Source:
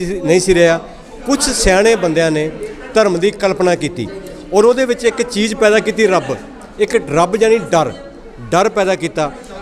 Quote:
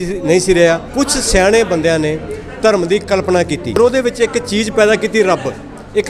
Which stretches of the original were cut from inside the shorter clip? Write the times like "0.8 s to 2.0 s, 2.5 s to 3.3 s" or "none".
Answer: 0.9 s to 1.2 s, 4.1 s to 4.6 s